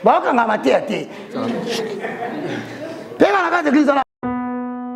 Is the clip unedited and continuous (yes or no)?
no